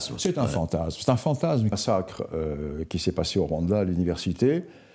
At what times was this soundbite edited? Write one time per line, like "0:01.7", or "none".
0:01.8

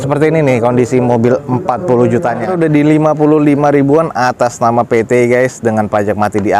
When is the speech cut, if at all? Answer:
0:02.5

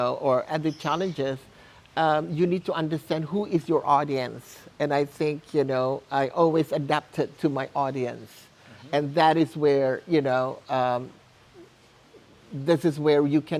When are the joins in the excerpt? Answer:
none

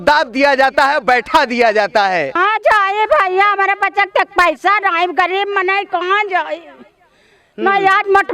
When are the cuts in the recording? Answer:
0:02.4

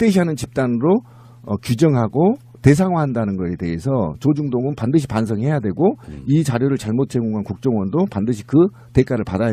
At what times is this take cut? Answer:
0:02.1

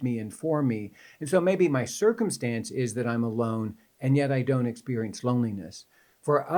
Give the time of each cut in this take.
none

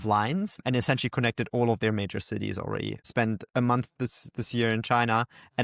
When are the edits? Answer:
0:03.1

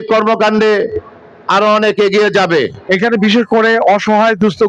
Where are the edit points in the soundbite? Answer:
0:02.8

